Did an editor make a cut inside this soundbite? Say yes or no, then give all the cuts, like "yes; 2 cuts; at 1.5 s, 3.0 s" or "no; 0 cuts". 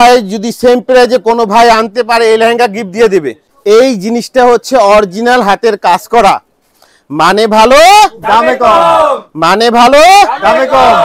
yes; 1 cut; at 3.5 s